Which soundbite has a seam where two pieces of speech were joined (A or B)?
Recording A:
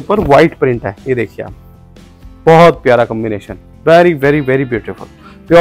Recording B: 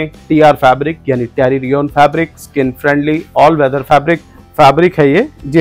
B